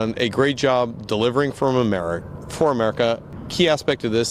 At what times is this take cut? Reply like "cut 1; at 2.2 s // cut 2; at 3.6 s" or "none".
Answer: cut 1; at 3.3 s